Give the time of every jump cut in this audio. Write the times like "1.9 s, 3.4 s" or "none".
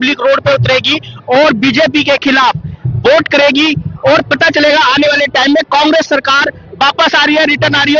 none